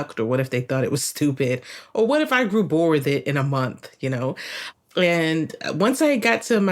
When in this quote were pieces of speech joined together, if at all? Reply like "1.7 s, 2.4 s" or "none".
4.6 s